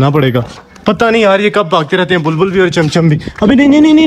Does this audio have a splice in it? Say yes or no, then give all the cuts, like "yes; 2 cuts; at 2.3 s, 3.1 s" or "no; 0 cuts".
no; 0 cuts